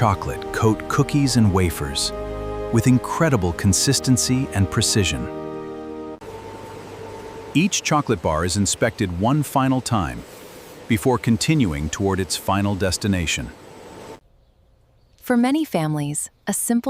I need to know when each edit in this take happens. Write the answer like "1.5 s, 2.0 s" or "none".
6.2 s, 14.2 s